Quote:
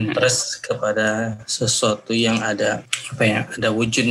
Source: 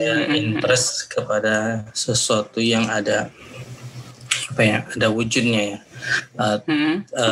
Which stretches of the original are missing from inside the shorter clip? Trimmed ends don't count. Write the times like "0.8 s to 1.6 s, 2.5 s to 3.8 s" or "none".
3.4 s to 4.3 s